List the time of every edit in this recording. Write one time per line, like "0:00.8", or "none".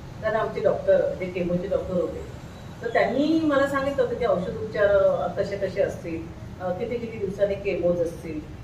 none